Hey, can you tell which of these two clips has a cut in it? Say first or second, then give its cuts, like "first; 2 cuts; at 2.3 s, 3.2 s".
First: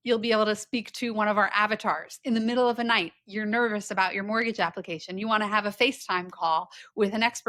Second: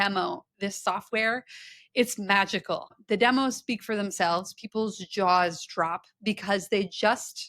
second; 1 cut; at 3.0 s